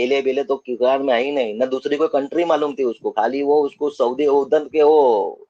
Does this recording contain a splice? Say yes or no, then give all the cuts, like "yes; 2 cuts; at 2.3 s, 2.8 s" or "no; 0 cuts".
no; 0 cuts